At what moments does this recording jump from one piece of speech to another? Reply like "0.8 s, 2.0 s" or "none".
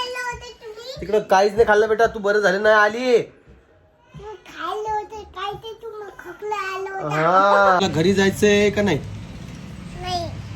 7.8 s